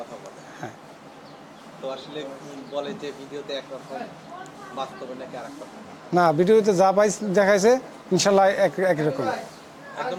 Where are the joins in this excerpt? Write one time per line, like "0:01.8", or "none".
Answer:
none